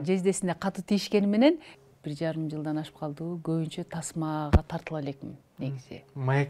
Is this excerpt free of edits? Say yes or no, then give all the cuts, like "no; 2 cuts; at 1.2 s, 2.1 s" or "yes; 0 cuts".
no; 1 cut; at 1.7 s